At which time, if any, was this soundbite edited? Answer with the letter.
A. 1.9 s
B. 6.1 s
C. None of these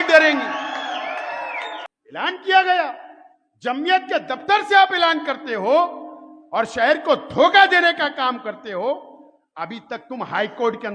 A